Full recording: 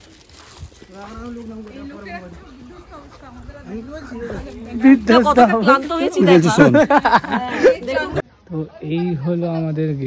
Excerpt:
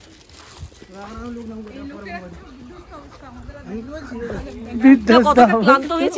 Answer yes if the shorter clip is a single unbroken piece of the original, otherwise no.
yes